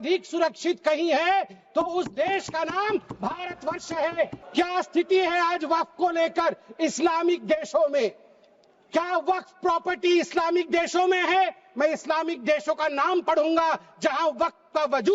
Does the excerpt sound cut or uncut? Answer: cut